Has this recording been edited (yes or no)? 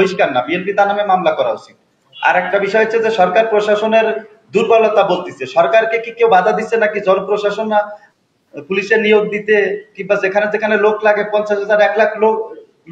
no